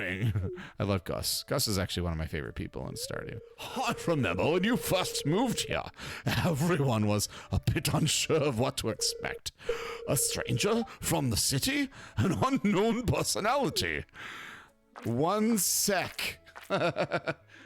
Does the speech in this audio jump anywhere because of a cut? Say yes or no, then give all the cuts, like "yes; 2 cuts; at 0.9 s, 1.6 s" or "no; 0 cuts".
yes; 1 cut; at 3.6 s